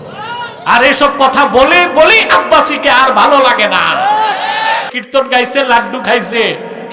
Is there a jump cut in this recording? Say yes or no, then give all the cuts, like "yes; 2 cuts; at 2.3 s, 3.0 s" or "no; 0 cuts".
yes; 1 cut; at 5.0 s